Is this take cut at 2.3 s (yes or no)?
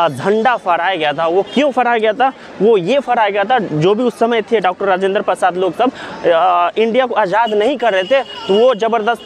no